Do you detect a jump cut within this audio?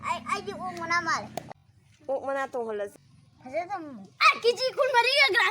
yes; 2 cuts; at 1.5 s, 3.0 s

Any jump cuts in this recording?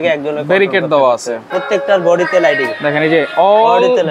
yes; 1 cut; at 1.4 s

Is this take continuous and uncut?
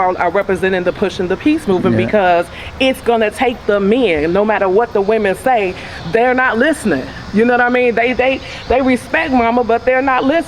yes; 0 cuts

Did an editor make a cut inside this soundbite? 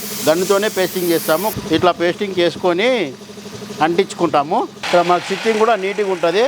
yes; 2 cuts; at 1.5 s, 4.8 s

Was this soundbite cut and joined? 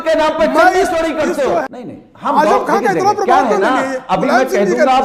yes; 1 cut; at 1.7 s

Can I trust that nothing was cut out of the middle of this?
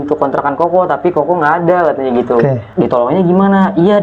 no; 1 cut; at 2.7 s

